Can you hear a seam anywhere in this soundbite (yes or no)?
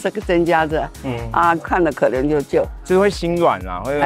yes